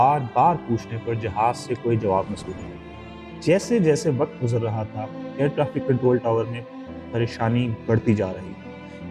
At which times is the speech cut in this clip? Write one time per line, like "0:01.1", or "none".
none